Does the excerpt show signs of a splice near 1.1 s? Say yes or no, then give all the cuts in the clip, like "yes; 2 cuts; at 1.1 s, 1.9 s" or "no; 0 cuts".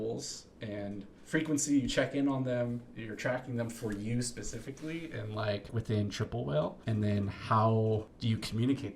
yes; 4 cuts; at 1.1 s, 5.7 s, 6.8 s, 8.1 s